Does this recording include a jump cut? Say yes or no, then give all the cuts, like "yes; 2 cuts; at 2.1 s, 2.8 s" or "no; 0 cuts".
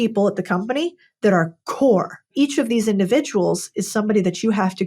yes; 1 cut; at 2.3 s